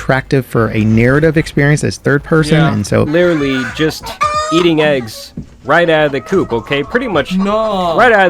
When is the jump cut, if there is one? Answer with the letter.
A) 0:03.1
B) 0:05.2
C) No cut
A